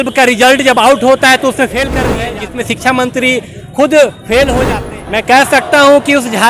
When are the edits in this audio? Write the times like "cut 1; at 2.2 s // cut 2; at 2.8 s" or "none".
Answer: cut 1; at 2.2 s // cut 2; at 4.6 s

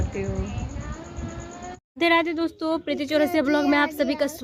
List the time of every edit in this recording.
none

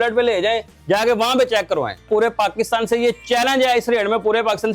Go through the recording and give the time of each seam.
cut 1; at 2.1 s

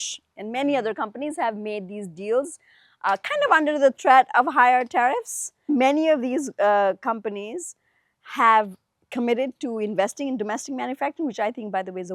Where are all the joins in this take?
cut 1; at 5.7 s

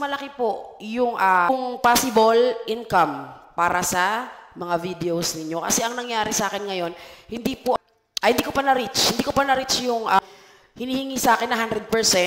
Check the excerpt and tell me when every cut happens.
cut 1; at 1.5 s // cut 2; at 7.8 s // cut 3; at 10.2 s

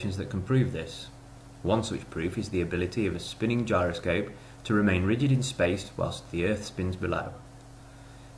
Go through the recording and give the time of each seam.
none

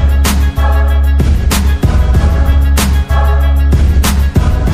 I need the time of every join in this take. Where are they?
none

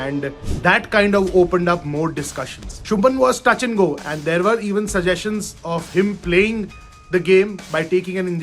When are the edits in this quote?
cut 1; at 2.8 s // cut 2; at 4.0 s

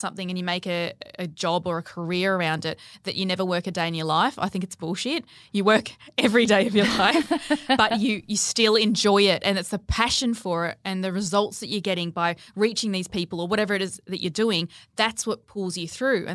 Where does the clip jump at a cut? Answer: none

